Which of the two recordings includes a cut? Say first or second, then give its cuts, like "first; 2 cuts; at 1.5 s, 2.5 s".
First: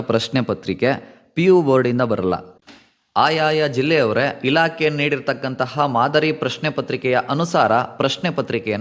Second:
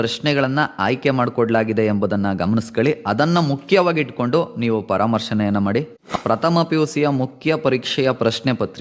second; 1 cut; at 6.1 s